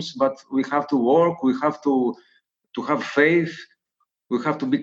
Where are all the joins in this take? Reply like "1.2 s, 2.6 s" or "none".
none